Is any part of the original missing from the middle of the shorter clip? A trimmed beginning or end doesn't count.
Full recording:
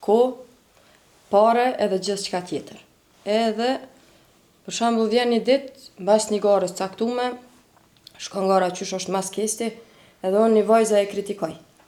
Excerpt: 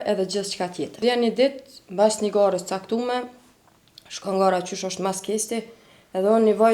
yes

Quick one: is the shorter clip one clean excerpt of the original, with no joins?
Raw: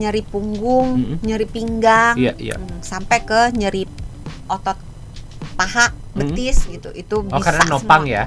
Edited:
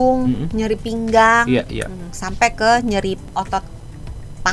no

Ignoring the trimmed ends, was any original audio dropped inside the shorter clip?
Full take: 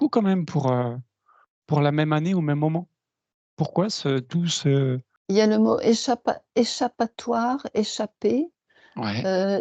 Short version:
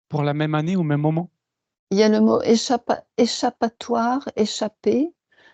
yes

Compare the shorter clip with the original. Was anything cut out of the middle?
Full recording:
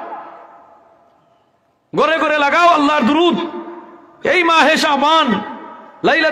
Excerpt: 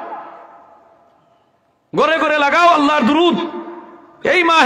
no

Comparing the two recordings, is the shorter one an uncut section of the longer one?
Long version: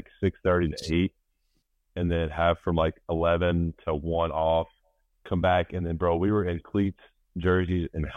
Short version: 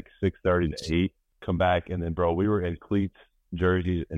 no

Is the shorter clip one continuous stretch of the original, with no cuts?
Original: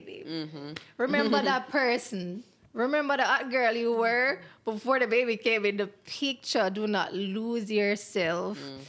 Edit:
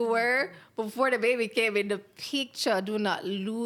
yes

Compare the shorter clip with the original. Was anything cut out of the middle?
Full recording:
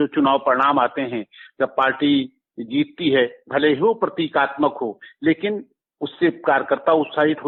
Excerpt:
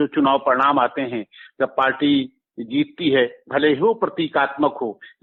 no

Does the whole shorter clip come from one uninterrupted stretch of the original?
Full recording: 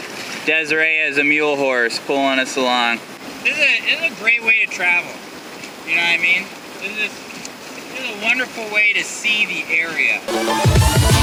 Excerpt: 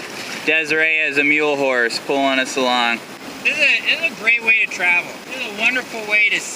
no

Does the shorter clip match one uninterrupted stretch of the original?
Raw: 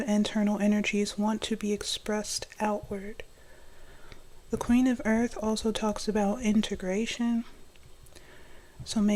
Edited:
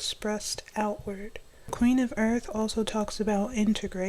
no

